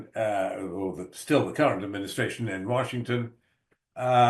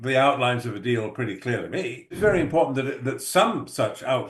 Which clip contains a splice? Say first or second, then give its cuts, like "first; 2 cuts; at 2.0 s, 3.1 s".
second; 1 cut; at 2.2 s